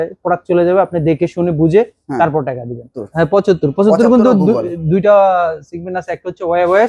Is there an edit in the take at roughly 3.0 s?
yes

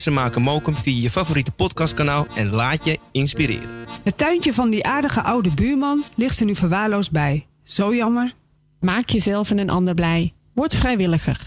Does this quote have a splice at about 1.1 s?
no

